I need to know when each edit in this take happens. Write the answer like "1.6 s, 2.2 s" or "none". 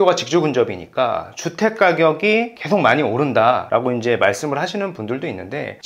2.5 s